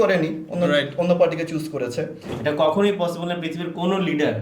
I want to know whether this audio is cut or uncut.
cut